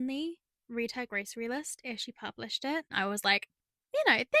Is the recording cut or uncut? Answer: cut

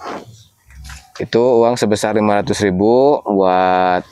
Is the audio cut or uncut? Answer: uncut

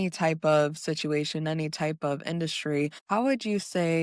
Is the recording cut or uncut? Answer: cut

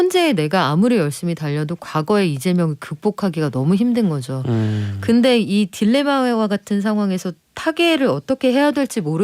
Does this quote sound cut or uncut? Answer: uncut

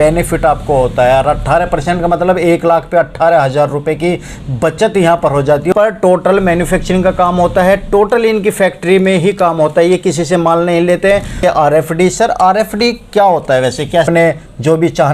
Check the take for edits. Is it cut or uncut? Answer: cut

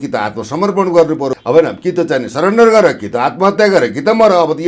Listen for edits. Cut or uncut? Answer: cut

